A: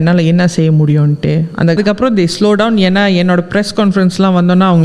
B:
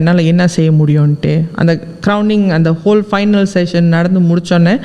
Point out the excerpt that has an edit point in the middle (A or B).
A